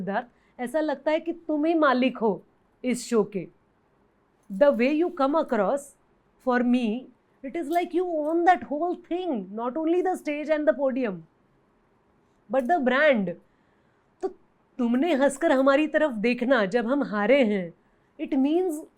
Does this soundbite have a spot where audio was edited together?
no; 0 cuts

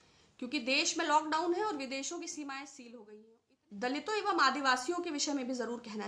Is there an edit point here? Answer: yes; 1 cut; at 3.1 s

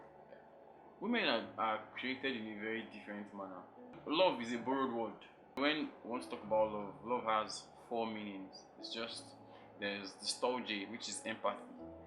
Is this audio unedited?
no; 2 cuts; at 4.0 s, 5.6 s

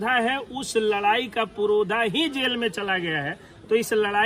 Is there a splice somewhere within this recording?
no; 0 cuts

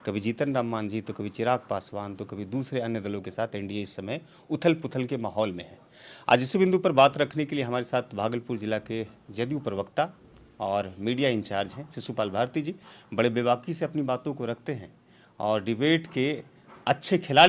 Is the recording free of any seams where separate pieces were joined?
yes; 0 cuts

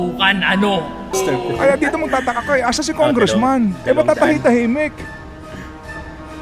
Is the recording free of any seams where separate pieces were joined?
no; 1 cut; at 1.1 s

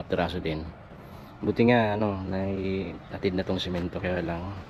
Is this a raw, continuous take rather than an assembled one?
yes; 0 cuts

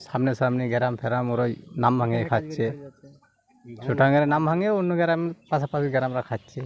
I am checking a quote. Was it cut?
no; 0 cuts

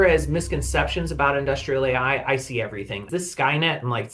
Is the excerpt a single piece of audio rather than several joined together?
no; 1 cut; at 3.0 s

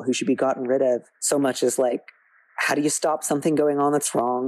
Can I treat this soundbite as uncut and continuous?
no; 1 cut; at 1.1 s

